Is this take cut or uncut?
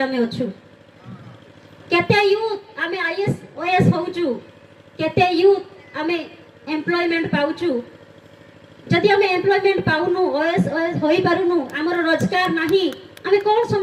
uncut